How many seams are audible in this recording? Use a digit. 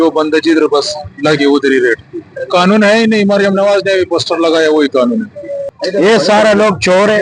1